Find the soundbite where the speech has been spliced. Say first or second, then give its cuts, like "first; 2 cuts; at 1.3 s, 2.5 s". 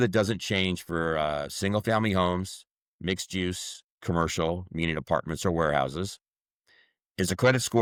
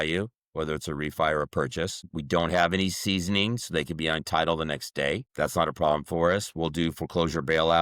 second; 2 cuts; at 2.1 s, 5.3 s